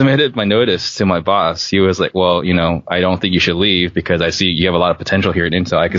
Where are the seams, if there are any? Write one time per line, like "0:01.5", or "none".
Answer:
none